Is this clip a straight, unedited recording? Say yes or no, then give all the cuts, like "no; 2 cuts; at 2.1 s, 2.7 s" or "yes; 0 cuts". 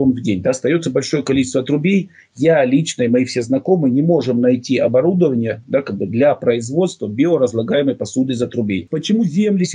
no; 1 cut; at 8.8 s